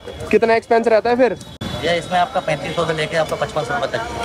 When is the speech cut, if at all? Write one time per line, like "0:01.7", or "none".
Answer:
none